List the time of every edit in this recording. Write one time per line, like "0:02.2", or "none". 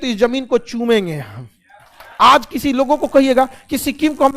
0:02.0